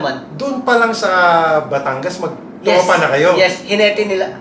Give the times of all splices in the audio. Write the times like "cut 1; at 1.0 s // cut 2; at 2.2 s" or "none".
none